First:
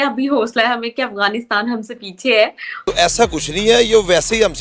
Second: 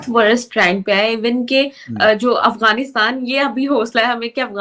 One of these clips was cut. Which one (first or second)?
first